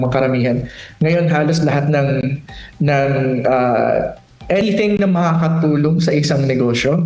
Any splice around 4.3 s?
no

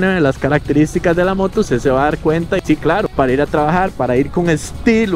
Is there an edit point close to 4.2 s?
no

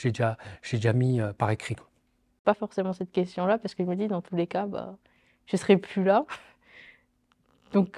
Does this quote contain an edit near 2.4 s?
yes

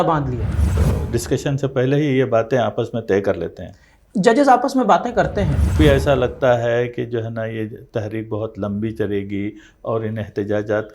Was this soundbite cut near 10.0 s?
no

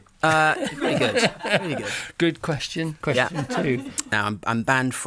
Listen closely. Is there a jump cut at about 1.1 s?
no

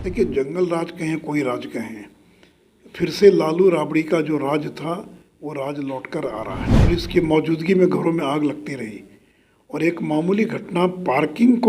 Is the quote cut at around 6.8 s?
yes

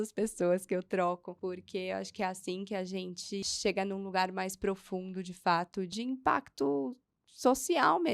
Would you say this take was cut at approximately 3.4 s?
yes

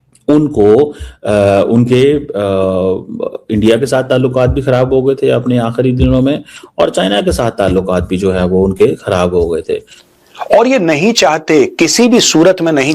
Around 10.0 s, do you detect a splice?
yes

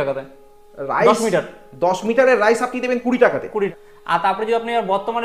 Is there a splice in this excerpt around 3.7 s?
yes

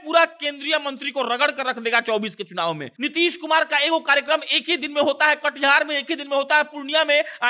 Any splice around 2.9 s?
yes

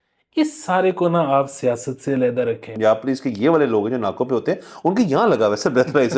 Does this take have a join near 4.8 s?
no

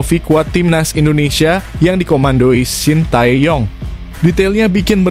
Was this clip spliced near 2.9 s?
no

